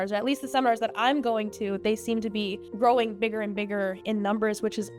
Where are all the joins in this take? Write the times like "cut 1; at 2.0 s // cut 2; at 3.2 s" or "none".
cut 1; at 2.6 s